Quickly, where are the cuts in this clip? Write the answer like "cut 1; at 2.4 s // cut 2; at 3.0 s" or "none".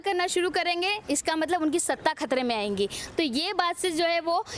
none